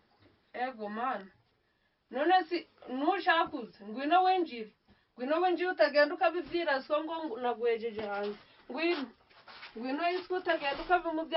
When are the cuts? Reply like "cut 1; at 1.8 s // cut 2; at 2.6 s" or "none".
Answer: none